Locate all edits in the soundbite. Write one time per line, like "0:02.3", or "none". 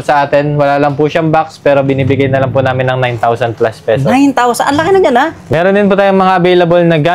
0:05.4